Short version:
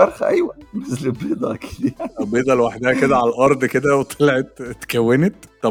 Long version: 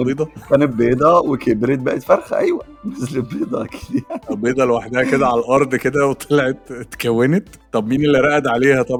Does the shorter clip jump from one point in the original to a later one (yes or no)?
no